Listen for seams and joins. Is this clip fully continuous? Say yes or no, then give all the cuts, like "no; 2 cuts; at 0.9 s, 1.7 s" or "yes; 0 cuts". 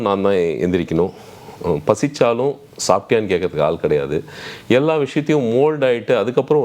yes; 0 cuts